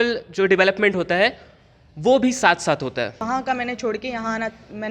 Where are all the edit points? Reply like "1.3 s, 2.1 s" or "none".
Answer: 3.2 s